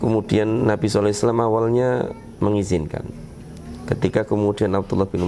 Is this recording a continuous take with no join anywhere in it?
yes; 0 cuts

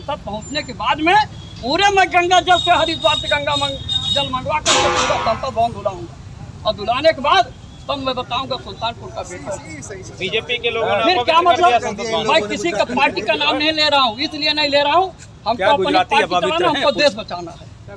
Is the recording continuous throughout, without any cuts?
yes; 0 cuts

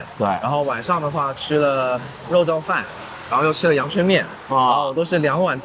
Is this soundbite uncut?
yes; 0 cuts

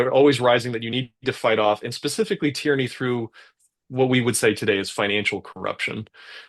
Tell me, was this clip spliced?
no; 0 cuts

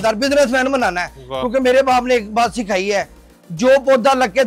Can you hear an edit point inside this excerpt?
no; 0 cuts

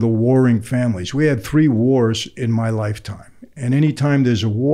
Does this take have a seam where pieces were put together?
no; 0 cuts

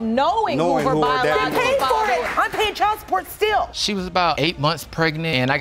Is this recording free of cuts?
no; 1 cut; at 3.7 s

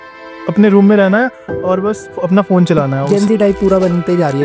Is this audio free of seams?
no; 1 cut; at 3.0 s

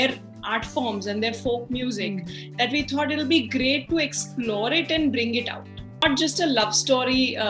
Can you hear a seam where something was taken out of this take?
yes; 1 cut; at 6.0 s

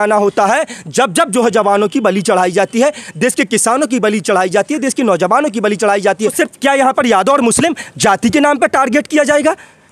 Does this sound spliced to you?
yes; 1 cut; at 6.3 s

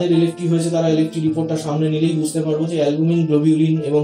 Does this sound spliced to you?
no; 0 cuts

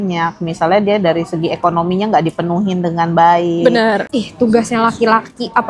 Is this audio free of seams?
no; 1 cut; at 4.1 s

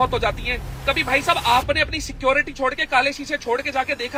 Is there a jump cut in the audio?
no; 0 cuts

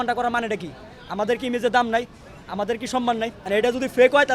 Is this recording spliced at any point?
yes; 1 cut; at 3.4 s

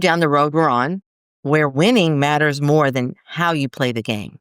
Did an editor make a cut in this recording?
yes; 1 cut; at 1.7 s

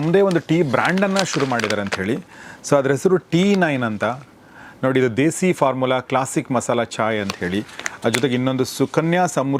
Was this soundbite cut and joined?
no; 0 cuts

